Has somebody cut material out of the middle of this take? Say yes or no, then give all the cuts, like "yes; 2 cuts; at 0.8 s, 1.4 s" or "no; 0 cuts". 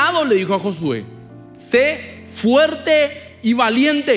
no; 0 cuts